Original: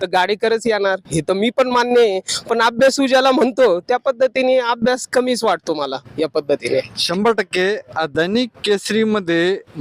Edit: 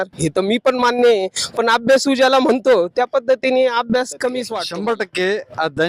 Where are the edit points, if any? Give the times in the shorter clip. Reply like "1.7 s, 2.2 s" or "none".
4.6 s